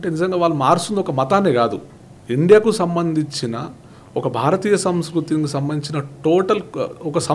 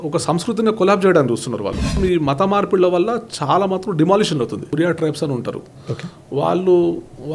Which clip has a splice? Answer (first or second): second